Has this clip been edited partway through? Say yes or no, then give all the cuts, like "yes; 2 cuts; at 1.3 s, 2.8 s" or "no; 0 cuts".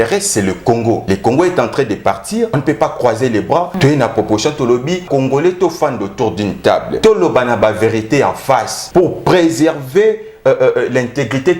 yes; 6 cuts; at 1.0 s, 2.6 s, 3.7 s, 5.0 s, 6.9 s, 8.8 s